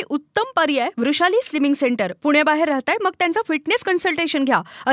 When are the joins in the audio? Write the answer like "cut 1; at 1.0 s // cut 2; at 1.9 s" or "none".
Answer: none